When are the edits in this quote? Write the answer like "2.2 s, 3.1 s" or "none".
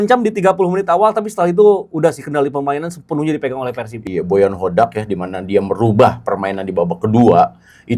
4.0 s